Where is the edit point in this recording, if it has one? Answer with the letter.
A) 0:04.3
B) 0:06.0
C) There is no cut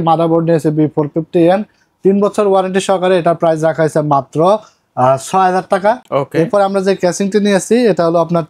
C